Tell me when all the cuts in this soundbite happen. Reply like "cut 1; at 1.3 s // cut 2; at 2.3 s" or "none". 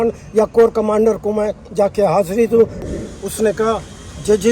cut 1; at 2.8 s